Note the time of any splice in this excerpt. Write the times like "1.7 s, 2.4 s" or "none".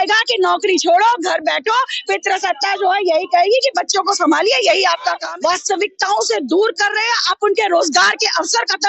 5.2 s